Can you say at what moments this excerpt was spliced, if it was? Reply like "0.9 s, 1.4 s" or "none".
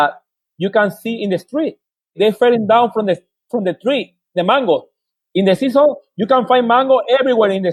none

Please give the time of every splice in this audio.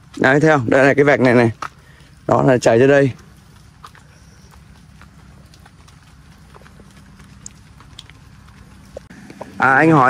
9.1 s

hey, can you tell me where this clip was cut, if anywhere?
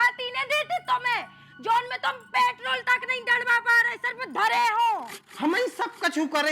5.1 s

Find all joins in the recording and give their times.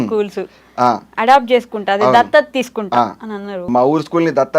3.7 s

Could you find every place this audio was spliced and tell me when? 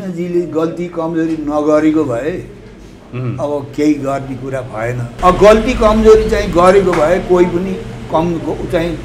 5.1 s

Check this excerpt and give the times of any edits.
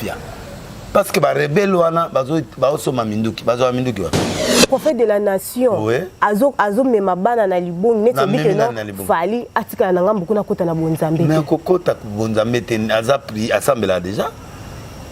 4.5 s

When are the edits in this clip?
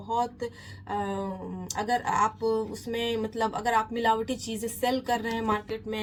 none

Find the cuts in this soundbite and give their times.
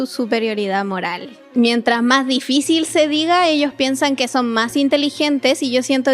1.5 s

